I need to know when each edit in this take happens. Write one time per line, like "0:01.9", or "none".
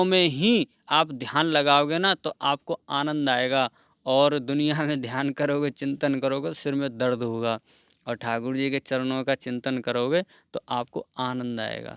none